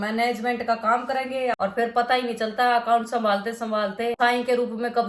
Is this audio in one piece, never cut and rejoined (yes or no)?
no